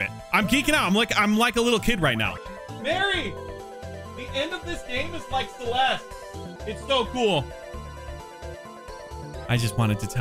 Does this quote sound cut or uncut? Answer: cut